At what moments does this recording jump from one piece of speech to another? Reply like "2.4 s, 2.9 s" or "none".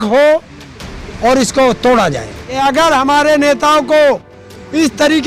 2.6 s

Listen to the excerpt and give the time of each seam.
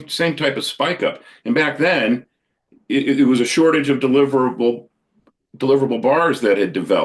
none

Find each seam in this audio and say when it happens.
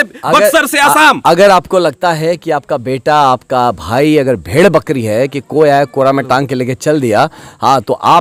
none

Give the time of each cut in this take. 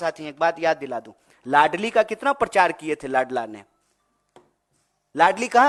none

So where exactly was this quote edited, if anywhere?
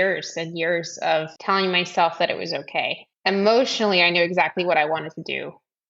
1.3 s, 3.1 s

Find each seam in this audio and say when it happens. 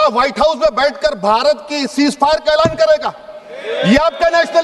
none

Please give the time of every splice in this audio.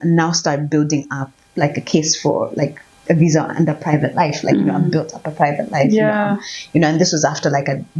none

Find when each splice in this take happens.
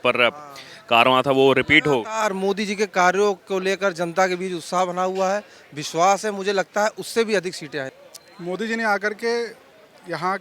7.9 s

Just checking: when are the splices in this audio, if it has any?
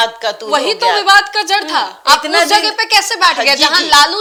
none

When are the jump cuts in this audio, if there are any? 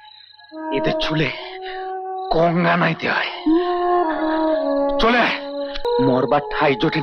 5.9 s

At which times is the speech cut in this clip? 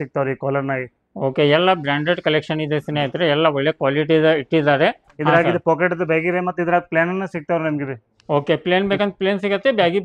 5.1 s

